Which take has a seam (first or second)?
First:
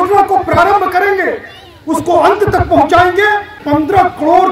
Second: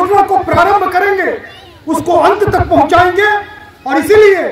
first